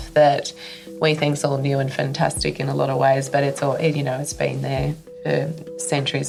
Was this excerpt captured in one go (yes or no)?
yes